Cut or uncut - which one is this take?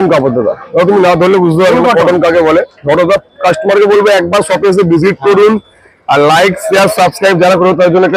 uncut